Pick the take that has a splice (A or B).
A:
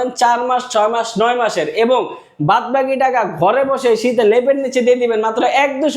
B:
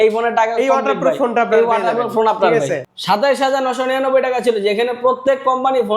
B